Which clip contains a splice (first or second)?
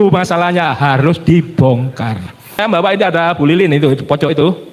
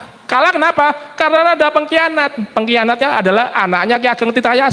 first